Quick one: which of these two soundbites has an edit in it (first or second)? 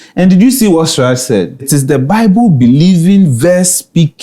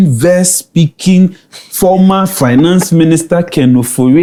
first